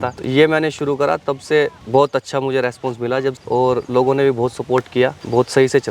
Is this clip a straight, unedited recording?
yes; 0 cuts

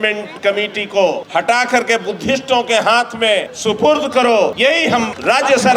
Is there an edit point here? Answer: yes; 3 cuts; at 1.2 s, 3.5 s, 4.9 s

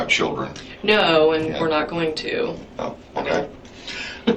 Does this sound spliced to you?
no; 0 cuts

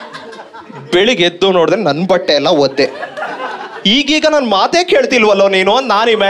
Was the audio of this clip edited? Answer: no; 0 cuts

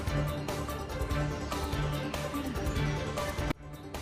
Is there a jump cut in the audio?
no; 0 cuts

